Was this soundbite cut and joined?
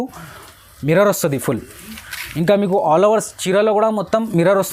no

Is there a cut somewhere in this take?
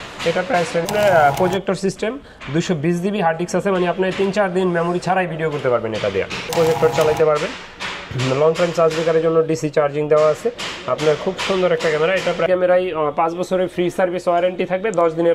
yes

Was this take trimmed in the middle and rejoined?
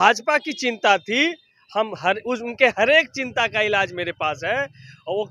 no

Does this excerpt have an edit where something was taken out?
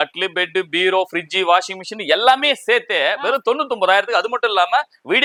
no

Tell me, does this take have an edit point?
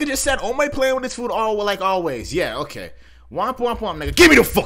no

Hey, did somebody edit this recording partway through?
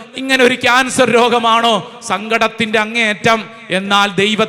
no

